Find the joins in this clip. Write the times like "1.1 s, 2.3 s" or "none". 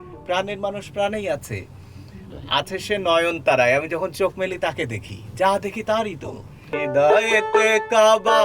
6.7 s